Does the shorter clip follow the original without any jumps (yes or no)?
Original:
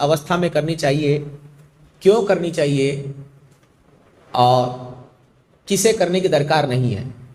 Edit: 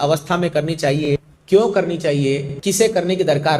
no